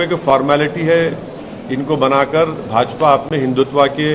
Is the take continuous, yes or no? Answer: yes